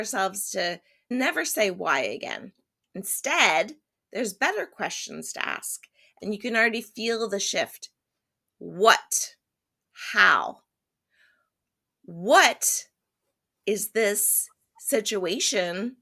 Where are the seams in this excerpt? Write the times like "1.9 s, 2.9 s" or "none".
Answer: 0.9 s